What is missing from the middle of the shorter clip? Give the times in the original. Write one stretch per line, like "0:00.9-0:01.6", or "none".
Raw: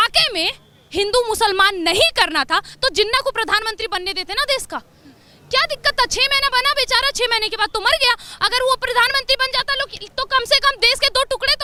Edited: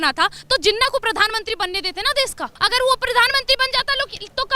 0:04.8-0:08.3